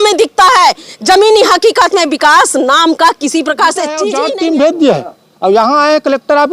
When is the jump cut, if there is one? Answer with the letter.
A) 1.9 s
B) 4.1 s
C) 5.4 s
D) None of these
B